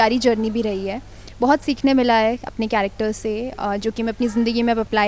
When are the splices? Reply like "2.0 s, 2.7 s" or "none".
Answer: none